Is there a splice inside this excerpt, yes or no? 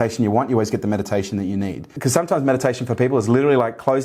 yes